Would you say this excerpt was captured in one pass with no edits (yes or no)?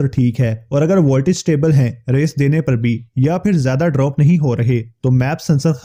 yes